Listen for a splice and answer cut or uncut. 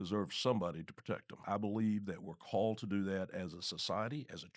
cut